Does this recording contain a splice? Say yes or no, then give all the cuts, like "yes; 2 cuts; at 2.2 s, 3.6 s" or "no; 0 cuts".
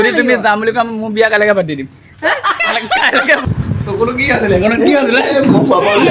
yes; 1 cut; at 3.5 s